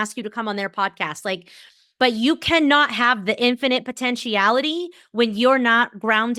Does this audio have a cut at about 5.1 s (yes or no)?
no